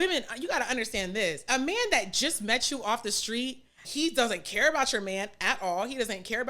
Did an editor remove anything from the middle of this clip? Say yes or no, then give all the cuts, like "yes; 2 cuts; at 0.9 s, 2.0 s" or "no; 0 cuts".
yes; 2 cuts; at 1.4 s, 3.8 s